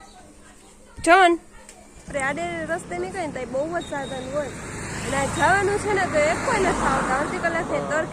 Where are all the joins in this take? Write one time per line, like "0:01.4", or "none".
0:02.1